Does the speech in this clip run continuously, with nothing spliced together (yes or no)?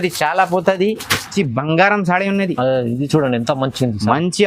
no